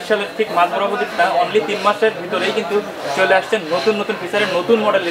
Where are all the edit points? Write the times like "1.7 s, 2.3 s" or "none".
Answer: none